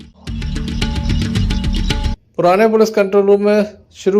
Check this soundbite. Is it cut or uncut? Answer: cut